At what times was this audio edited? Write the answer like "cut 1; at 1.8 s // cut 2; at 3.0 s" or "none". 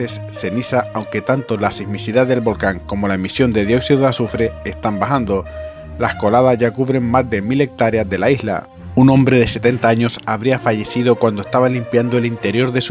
cut 1; at 8.8 s